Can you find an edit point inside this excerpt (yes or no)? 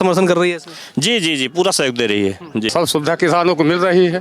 yes